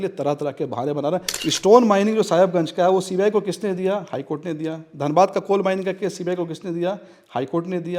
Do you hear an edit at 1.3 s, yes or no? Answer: yes